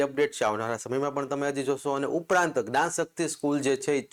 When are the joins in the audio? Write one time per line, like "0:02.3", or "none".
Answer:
none